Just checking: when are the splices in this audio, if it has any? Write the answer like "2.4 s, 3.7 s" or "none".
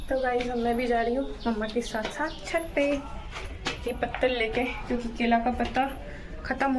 none